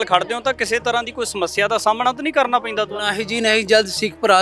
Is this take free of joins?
yes; 0 cuts

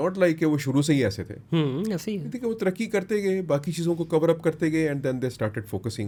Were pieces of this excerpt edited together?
no; 0 cuts

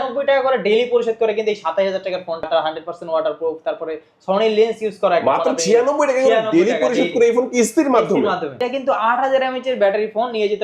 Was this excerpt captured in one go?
no; 2 cuts; at 2.4 s, 8.6 s

